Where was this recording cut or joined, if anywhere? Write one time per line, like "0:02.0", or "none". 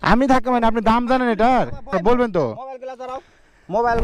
0:01.9